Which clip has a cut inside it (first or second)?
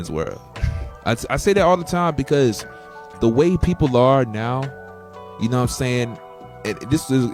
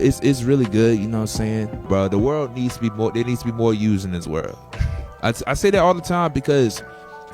second